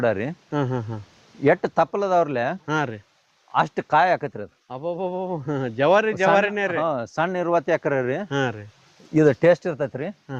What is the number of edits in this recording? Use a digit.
0